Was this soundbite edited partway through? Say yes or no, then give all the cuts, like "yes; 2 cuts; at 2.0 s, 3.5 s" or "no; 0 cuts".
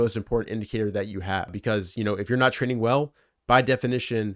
yes; 1 cut; at 1.6 s